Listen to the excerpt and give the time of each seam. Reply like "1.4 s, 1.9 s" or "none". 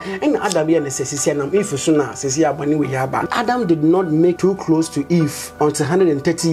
3.3 s, 4.4 s, 5.4 s